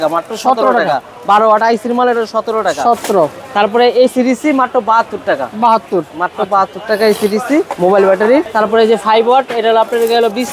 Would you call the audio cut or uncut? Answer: uncut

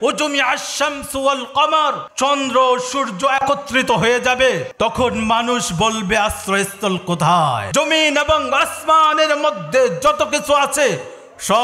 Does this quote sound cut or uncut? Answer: cut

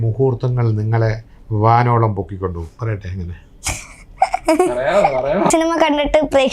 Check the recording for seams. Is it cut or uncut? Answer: cut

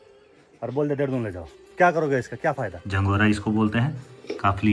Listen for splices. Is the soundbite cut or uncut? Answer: cut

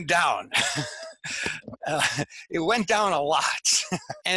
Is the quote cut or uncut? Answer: uncut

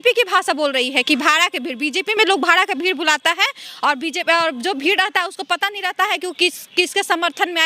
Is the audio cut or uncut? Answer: uncut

